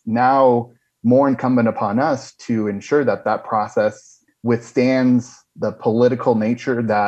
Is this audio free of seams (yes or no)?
yes